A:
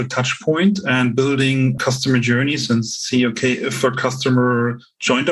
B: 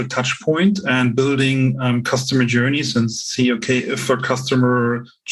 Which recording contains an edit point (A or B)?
A